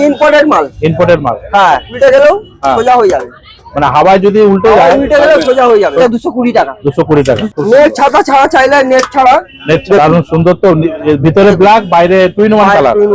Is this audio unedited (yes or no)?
no